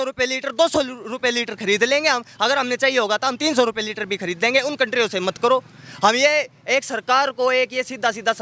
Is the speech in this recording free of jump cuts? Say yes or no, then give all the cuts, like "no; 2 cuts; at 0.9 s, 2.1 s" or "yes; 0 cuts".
yes; 0 cuts